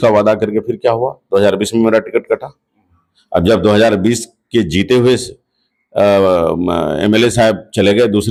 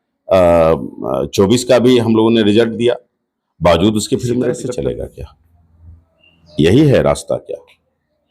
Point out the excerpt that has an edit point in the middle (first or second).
second